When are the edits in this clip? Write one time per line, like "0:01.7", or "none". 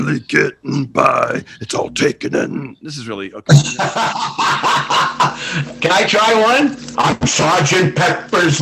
0:06.8